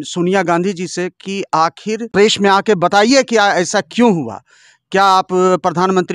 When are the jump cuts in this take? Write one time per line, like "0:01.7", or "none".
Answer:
0:02.0